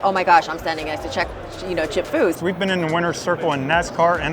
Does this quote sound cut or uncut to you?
cut